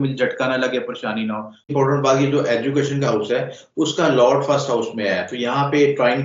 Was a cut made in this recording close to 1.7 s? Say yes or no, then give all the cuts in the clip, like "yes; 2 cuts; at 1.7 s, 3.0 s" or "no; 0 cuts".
yes; 1 cut; at 1.7 s